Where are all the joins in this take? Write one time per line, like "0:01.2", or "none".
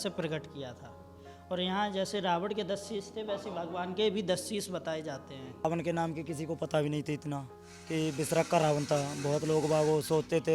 0:05.6